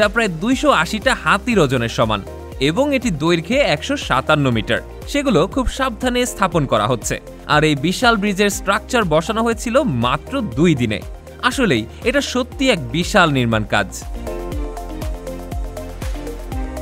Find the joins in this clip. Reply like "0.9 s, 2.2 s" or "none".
14.0 s, 15.6 s